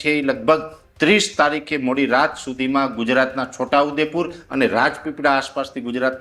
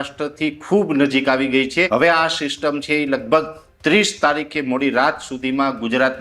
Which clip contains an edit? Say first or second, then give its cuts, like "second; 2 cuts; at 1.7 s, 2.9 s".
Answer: second; 1 cut; at 1.9 s